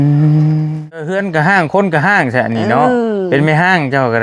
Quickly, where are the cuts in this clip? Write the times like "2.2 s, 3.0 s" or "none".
1.1 s